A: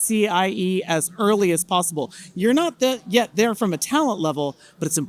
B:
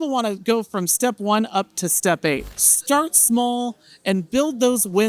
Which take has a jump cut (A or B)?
B